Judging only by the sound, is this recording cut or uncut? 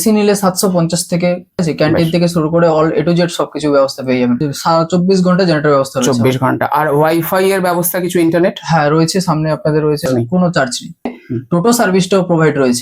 cut